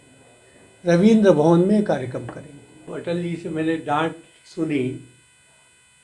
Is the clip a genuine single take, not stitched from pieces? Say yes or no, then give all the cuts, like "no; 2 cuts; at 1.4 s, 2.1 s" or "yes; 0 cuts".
no; 1 cut; at 2.9 s